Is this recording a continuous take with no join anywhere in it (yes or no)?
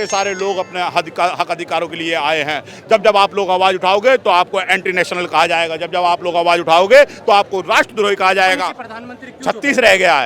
no